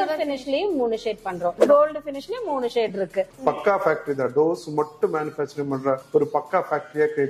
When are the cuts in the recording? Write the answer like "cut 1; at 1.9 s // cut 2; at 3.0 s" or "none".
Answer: cut 1; at 3.3 s